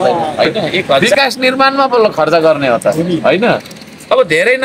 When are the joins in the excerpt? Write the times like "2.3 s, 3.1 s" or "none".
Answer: 1.1 s